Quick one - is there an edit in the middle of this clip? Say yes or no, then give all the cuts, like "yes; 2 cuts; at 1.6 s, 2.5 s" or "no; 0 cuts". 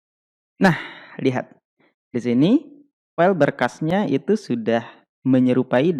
no; 0 cuts